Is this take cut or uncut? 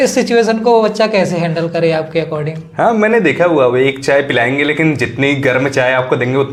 uncut